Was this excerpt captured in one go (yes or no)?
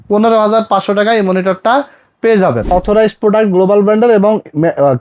no